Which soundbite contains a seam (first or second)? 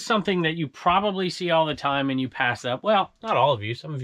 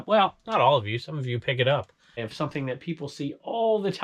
second